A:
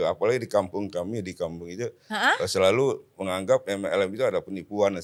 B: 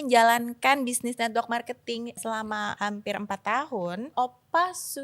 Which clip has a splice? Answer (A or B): B